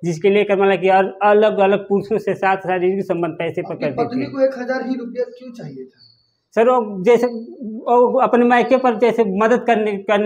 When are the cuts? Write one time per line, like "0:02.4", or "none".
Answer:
none